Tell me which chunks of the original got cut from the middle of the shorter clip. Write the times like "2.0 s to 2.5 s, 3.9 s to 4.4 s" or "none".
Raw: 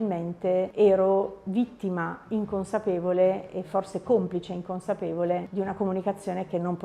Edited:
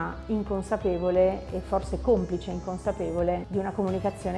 none

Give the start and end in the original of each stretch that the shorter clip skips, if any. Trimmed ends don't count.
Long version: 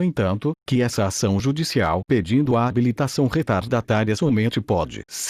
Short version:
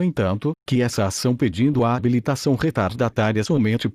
1.4 s to 2.1 s

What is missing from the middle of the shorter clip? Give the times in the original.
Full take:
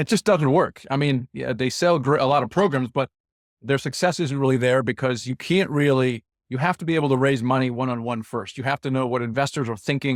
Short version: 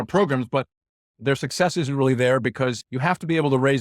5.3 s to 6.4 s

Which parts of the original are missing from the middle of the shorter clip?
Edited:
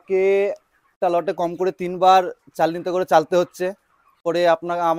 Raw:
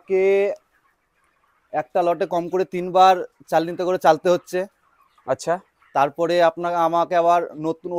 0.9 s to 1.9 s, 5.1 s to 6.1 s

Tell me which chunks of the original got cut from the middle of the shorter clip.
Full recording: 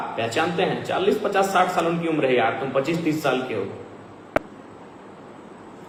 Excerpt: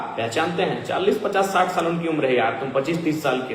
none

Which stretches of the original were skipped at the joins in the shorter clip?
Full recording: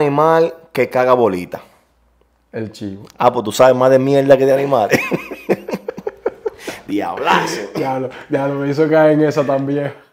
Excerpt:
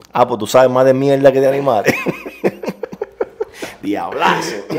none

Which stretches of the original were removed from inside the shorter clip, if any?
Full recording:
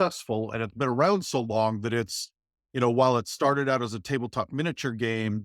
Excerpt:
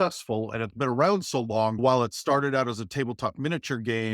1.8 s to 2.9 s

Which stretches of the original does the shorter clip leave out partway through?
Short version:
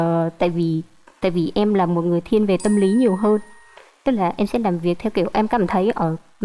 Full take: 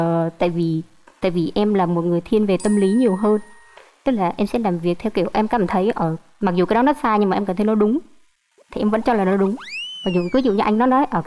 none

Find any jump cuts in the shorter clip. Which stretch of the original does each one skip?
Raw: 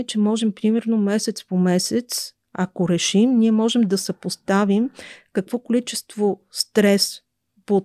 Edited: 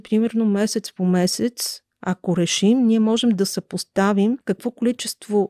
4.9 s to 5.3 s

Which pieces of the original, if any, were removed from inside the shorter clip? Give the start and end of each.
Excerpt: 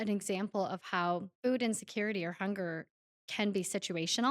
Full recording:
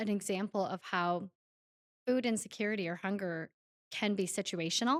1.3 s to 1.9 s

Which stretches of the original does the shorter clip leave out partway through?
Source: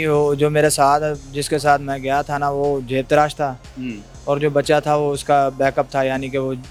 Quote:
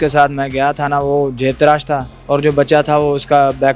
3.6 s to 4.1 s

